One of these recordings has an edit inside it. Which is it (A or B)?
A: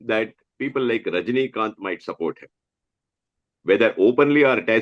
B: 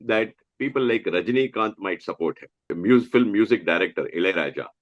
B